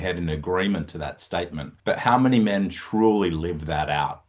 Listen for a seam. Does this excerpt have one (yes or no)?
yes